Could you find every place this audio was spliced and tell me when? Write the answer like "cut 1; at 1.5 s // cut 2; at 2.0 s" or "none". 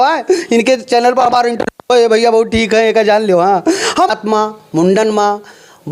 cut 1; at 4.1 s

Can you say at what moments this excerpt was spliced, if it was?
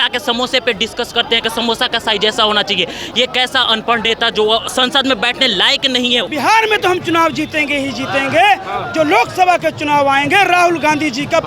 cut 1; at 6.3 s

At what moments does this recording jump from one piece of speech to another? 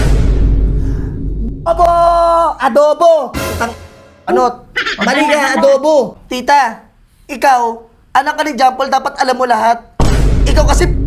cut 1; at 6.2 s

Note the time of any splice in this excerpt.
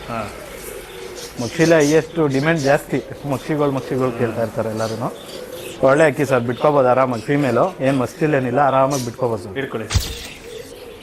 cut 1; at 10.1 s

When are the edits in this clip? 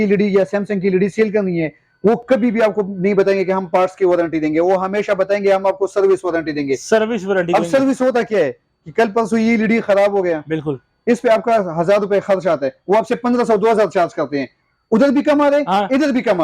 none

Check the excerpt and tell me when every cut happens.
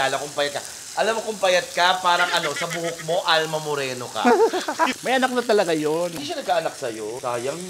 cut 1; at 4.9 s

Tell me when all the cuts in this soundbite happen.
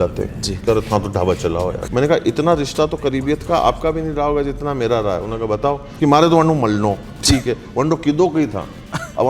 cut 1; at 1.8 s // cut 2; at 5.9 s

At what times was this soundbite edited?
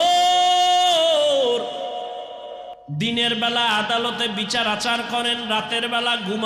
cut 1; at 2.7 s

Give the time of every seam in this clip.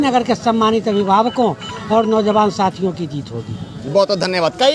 none

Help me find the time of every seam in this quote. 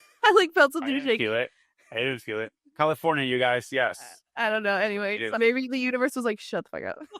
cut 1; at 5.4 s

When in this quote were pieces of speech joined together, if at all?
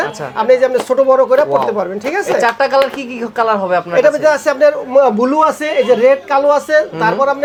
none

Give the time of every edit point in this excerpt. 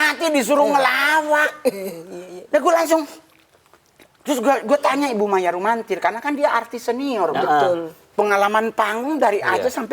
none

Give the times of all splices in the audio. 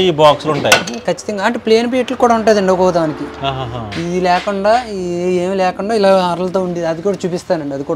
none

